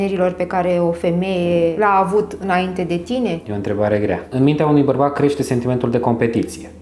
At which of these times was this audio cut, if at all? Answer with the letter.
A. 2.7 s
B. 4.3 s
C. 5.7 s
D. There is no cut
B